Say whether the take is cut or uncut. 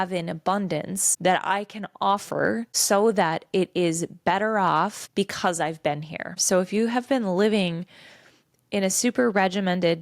cut